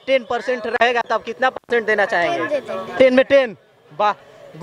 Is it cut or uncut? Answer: uncut